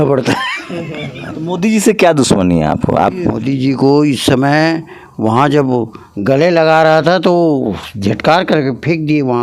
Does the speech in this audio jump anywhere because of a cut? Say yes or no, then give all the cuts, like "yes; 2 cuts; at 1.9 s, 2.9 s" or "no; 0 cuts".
yes; 2 cuts; at 1.4 s, 3.4 s